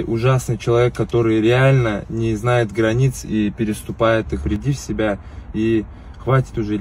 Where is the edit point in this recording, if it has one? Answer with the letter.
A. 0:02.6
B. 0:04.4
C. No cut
B